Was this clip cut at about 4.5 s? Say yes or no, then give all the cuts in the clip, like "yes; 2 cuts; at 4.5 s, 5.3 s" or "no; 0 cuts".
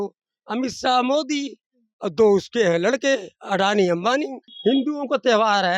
yes; 1 cut; at 4.5 s